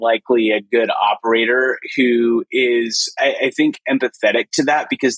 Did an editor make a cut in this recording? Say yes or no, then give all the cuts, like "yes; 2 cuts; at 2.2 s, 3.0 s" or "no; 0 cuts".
no; 0 cuts